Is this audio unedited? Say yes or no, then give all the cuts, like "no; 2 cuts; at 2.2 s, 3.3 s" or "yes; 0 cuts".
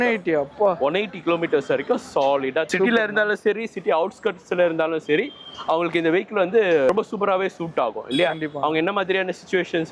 yes; 0 cuts